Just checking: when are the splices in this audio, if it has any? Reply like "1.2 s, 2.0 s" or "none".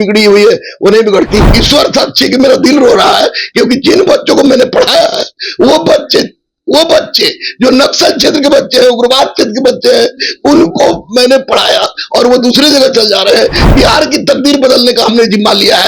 1.5 s